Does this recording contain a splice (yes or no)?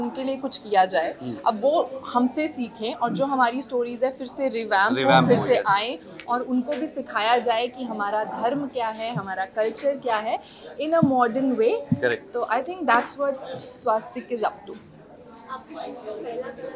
no